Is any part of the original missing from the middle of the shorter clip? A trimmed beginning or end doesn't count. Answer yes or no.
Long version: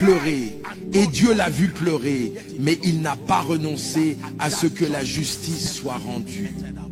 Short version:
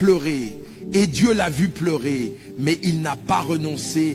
no